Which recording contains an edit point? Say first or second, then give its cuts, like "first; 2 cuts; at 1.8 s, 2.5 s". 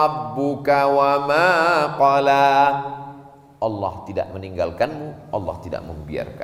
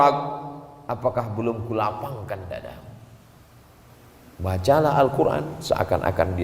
second; 1 cut; at 3.9 s